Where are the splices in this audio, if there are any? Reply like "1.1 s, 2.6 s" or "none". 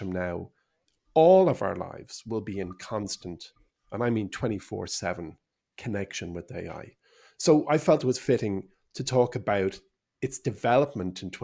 none